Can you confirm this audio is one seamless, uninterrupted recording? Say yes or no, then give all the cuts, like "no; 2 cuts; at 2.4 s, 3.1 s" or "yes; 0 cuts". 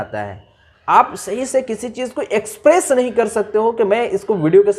yes; 0 cuts